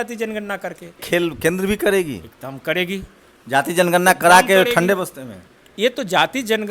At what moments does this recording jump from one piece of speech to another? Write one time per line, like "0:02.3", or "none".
0:01.0